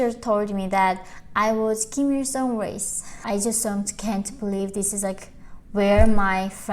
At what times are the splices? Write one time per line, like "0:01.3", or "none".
0:03.2